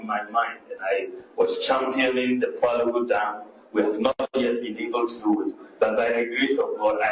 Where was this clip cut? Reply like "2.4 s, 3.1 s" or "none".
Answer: none